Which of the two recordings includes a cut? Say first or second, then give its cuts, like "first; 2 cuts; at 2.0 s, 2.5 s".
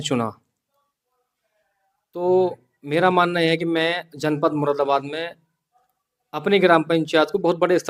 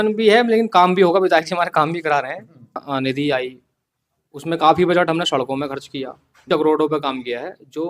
second; 2 cuts; at 2.8 s, 6.5 s